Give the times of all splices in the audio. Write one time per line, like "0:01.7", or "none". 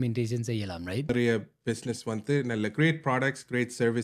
0:01.1